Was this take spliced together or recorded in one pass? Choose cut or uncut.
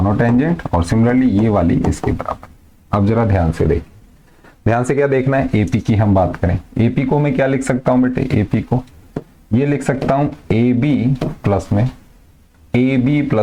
uncut